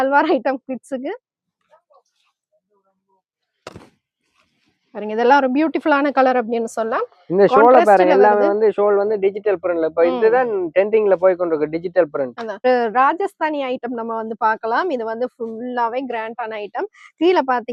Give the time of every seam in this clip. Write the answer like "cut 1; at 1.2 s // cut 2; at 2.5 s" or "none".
cut 1; at 12.6 s